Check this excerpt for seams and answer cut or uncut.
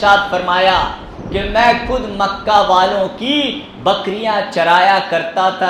uncut